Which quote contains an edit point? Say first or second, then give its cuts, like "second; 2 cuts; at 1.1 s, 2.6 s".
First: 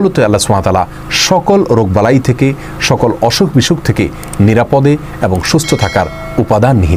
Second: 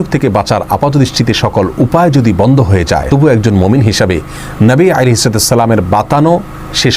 second; 1 cut; at 3.0 s